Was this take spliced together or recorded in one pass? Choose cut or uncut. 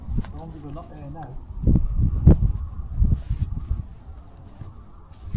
uncut